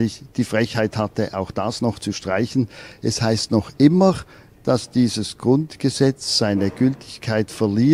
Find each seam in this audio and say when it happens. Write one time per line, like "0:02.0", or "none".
none

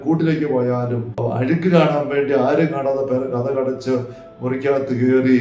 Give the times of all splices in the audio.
0:01.2

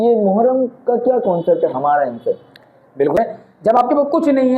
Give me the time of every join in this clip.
0:03.2

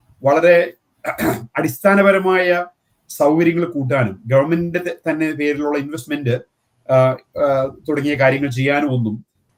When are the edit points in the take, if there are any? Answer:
none

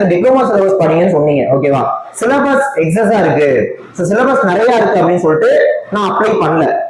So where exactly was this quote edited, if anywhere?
none

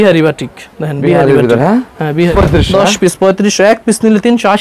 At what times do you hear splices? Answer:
0:02.3

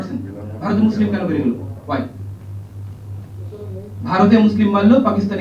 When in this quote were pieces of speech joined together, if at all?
none

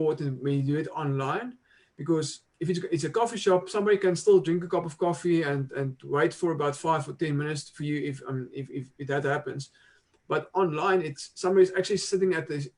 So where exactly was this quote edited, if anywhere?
none

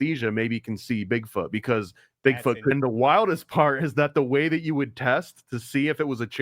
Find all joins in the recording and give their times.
0:02.7

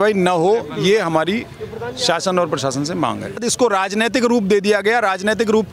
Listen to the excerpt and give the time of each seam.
0:03.5

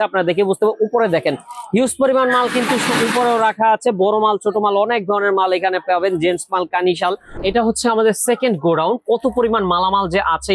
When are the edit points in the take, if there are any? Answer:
0:07.4

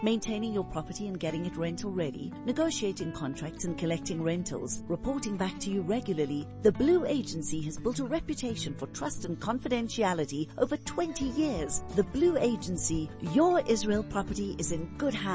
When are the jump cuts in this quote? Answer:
none

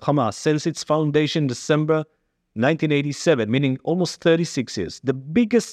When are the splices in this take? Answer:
none

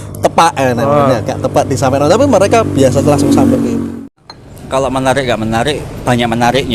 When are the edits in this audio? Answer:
0:04.0

